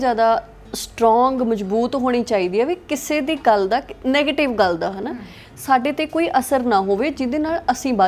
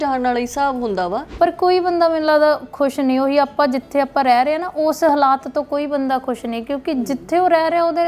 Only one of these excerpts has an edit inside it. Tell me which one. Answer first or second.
second